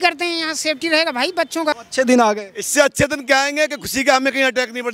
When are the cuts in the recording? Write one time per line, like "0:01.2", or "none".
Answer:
0:01.8